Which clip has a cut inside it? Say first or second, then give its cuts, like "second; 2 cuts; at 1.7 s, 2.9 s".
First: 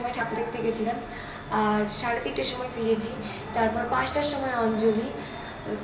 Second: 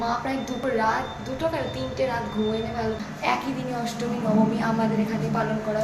second; 1 cut; at 3.0 s